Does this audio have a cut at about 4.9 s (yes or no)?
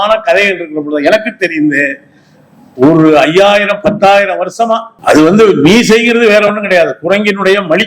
yes